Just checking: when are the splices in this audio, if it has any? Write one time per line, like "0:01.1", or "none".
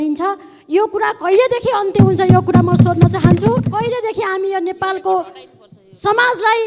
0:03.7